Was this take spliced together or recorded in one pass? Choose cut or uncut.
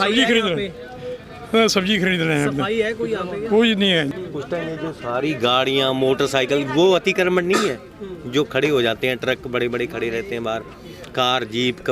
cut